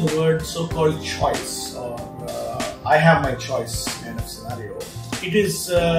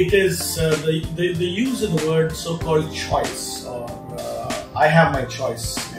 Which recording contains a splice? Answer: first; 1 cut; at 5.1 s

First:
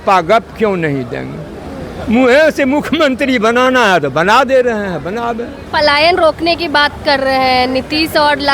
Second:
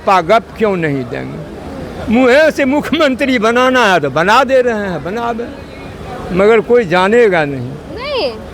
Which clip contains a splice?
first; 1 cut; at 5.5 s

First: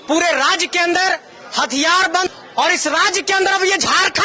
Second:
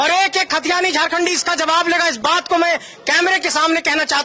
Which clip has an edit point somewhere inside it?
first; 1 cut; at 2.3 s

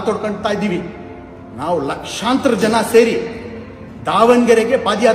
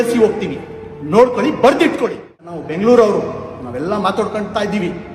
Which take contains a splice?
second; 1 cut; at 2.6 s

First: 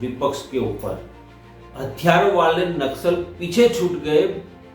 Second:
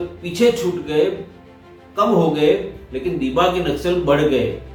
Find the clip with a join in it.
first; 1 cut; at 1.6 s

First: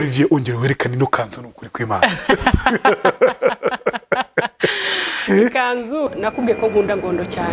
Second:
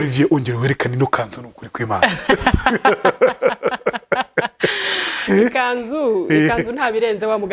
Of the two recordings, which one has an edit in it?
first; 1 cut; at 6.1 s

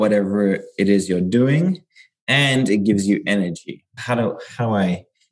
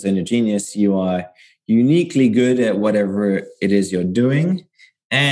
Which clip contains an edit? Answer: first; 1 cut; at 3.9 s

